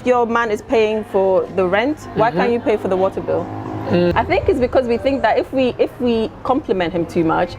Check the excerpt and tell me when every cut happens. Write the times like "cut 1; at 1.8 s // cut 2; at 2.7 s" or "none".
cut 1; at 4.1 s